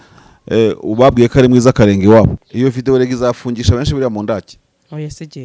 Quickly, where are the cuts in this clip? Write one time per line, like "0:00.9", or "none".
0:02.4